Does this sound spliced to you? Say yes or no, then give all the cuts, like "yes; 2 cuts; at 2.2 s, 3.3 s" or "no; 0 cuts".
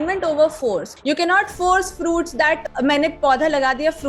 yes; 2 cuts; at 0.9 s, 2.7 s